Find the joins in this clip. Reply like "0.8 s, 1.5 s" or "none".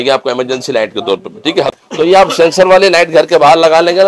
1.7 s